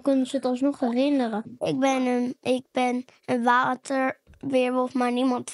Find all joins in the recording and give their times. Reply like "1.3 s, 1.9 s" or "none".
1.5 s